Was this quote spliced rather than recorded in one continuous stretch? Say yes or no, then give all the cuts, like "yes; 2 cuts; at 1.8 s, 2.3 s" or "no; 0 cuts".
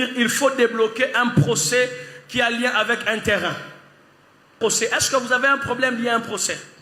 yes; 1 cut; at 4.5 s